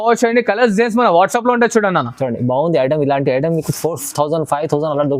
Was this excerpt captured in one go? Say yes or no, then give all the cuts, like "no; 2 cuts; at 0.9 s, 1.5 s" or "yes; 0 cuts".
yes; 0 cuts